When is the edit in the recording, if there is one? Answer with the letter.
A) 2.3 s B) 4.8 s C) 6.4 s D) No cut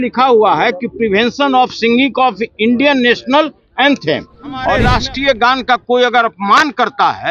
B